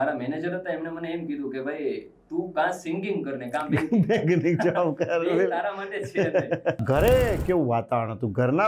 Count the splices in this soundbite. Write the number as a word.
one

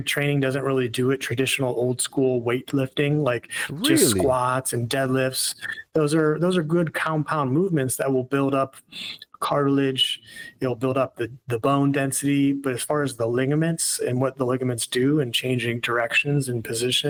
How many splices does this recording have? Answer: zero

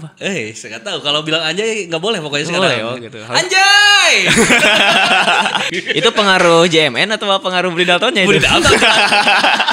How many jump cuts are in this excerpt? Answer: one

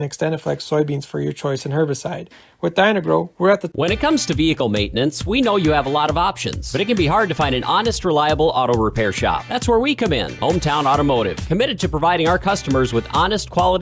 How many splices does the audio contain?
one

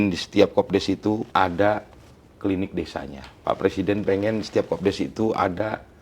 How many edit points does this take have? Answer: two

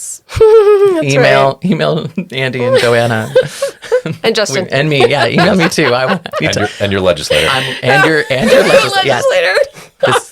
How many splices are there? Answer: zero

